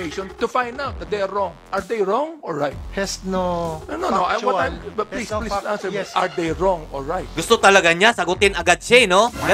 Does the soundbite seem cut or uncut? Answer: cut